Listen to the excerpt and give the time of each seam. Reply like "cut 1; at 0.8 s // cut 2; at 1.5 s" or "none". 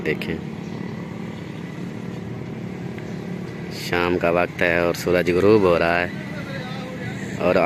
none